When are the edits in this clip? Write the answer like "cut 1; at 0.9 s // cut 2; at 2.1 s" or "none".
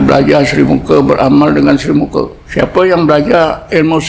cut 1; at 2.4 s